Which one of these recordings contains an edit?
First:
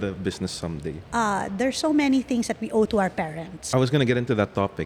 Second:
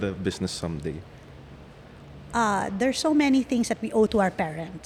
first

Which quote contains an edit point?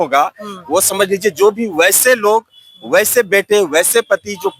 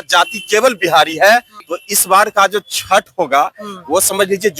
second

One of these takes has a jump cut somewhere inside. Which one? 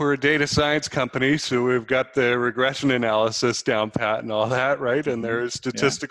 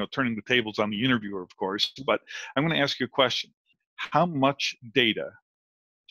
second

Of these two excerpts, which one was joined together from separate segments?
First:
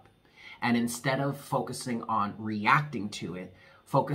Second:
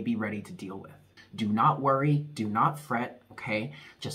second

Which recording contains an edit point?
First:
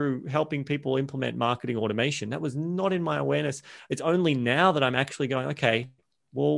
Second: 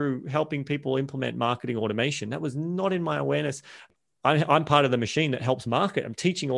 second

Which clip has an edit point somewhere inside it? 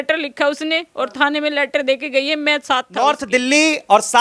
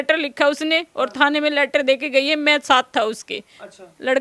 first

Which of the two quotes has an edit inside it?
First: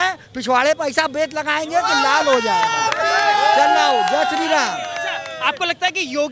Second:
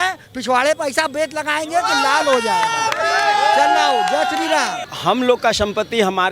second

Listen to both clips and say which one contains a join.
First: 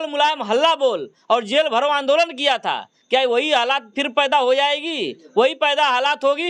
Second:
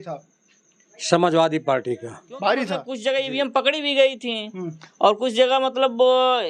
second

